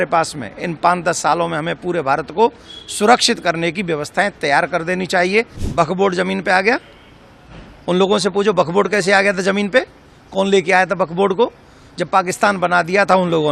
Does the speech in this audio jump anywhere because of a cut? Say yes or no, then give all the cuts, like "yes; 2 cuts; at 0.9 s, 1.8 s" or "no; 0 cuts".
yes; 1 cut; at 5.6 s